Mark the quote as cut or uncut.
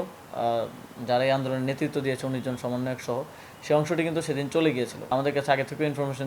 cut